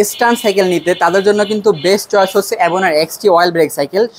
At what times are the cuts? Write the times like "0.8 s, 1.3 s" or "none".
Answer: none